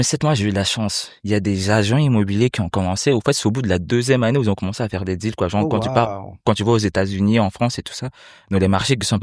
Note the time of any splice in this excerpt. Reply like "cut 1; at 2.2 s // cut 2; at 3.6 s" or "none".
none